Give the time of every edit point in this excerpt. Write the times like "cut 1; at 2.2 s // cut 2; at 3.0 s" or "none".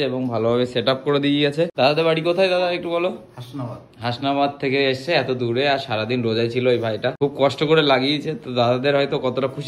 cut 1; at 1.7 s // cut 2; at 7.2 s

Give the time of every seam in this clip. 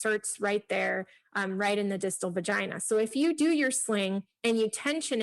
cut 1; at 4.3 s

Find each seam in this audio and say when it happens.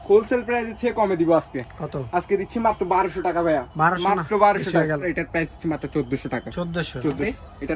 none

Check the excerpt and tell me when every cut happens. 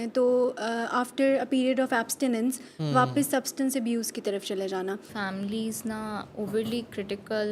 cut 1; at 5.1 s

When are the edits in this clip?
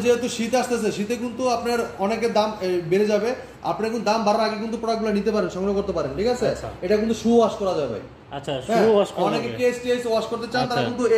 none

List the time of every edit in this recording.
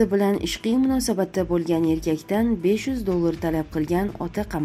none

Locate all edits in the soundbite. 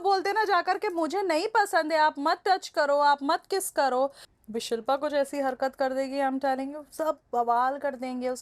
cut 1; at 4.2 s

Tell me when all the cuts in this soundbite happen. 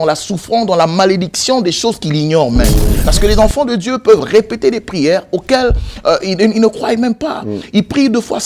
cut 1; at 2.9 s

